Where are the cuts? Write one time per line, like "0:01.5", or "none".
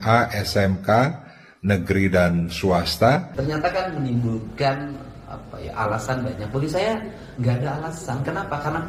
0:03.3